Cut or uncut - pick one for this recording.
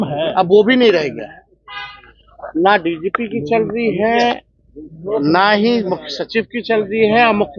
uncut